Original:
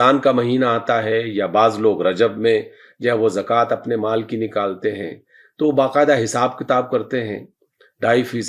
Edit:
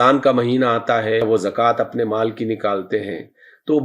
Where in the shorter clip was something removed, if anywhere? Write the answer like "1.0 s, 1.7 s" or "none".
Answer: 1.2 s